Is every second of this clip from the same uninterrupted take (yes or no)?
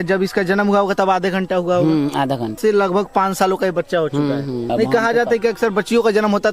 no